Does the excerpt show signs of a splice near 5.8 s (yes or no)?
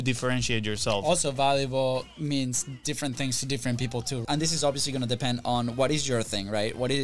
no